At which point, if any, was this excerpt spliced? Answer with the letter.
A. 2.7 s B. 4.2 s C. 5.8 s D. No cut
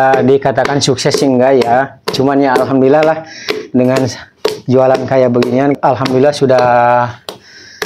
C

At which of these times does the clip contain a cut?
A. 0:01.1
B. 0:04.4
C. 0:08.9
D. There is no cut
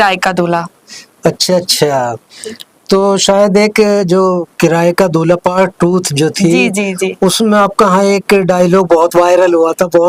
D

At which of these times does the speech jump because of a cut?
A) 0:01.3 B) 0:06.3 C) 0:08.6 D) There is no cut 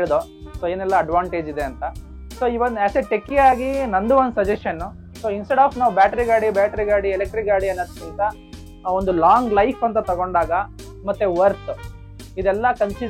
D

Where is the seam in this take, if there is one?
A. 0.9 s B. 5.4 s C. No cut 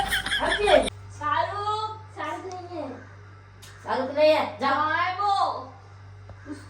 A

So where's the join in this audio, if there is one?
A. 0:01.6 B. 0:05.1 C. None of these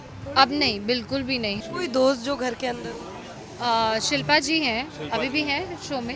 A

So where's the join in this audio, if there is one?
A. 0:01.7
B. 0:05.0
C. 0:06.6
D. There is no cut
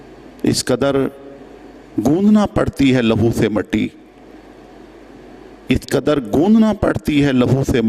D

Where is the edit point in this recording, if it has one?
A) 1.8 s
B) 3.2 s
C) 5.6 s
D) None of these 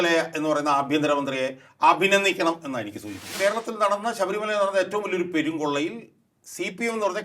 B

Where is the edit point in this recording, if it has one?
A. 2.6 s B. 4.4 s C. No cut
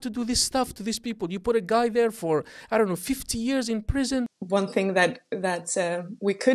B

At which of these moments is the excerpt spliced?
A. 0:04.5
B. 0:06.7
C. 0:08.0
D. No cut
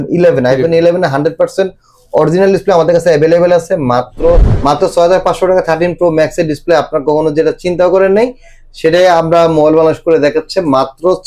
A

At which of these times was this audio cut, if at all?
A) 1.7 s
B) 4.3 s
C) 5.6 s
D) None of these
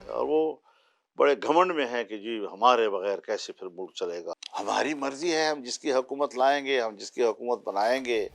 B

